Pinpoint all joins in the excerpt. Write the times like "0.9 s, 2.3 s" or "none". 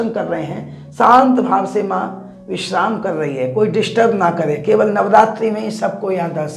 none